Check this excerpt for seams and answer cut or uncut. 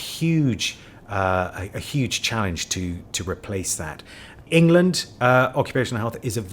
cut